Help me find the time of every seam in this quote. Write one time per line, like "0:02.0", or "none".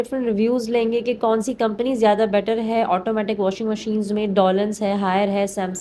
none